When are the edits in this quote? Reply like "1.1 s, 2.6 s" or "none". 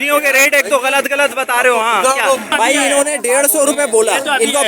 2.6 s